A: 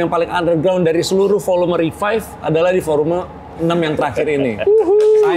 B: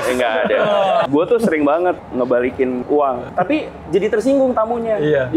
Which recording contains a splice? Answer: B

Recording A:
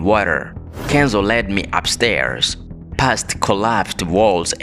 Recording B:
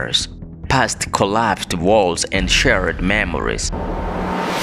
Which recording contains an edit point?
B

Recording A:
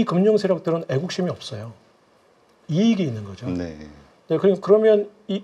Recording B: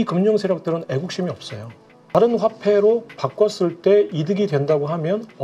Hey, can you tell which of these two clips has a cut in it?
B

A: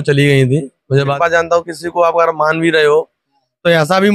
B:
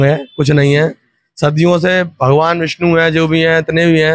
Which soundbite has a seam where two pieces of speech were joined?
A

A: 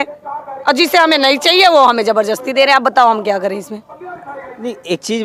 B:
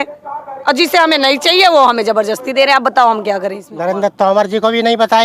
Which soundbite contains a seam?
B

